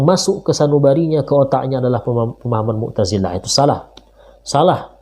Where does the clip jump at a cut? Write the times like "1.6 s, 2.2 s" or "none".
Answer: none